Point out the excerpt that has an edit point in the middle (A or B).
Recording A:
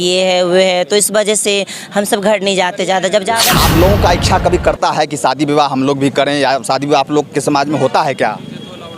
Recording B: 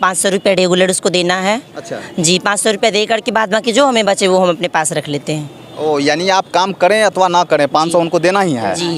A